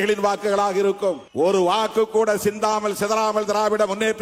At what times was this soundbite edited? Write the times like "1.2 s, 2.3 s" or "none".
1.2 s